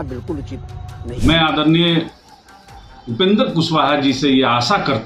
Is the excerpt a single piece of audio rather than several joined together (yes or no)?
no